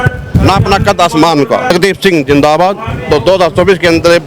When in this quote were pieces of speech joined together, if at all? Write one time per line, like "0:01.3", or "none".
0:01.7
0:02.9

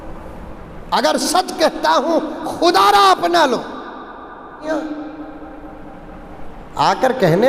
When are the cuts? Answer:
0:04.7

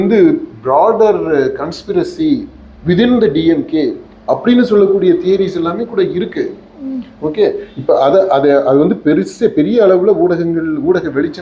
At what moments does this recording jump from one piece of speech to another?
none

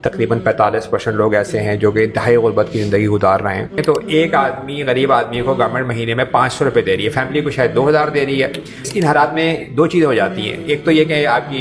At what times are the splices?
0:03.8
0:08.9

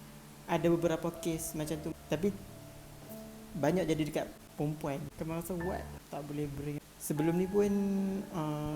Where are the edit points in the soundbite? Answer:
0:04.4
0:06.0

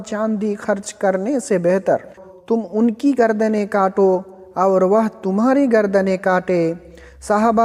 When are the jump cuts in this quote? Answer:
0:02.2

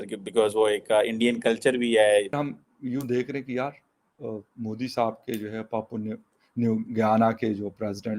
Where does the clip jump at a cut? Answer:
0:02.4

